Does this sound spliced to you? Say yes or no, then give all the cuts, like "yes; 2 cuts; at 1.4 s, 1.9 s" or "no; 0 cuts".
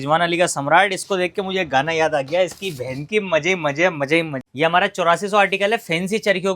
yes; 1 cut; at 4.4 s